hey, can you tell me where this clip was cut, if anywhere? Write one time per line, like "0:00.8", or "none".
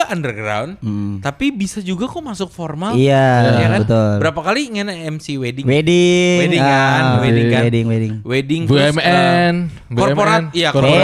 none